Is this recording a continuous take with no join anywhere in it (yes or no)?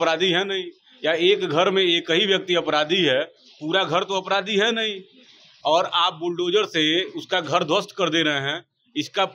yes